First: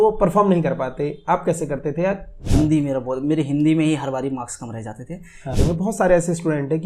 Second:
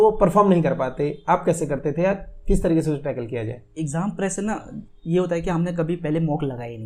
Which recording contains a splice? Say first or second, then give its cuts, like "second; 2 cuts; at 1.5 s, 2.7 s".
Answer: first; 2 cuts; at 2.3 s, 5.6 s